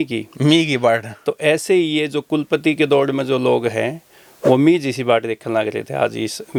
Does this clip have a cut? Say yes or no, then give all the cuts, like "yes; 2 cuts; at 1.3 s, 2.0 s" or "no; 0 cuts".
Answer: no; 0 cuts